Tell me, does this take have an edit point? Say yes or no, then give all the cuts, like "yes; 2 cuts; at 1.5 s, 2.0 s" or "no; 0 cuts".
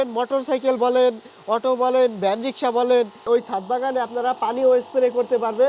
yes; 1 cut; at 3.3 s